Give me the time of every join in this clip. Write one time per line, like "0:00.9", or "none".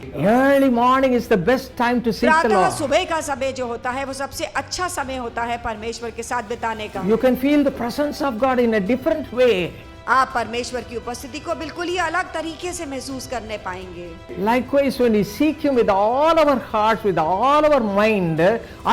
0:02.6
0:06.8